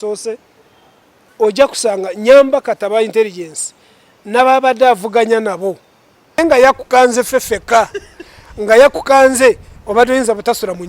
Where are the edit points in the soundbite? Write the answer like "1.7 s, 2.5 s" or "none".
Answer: 6.4 s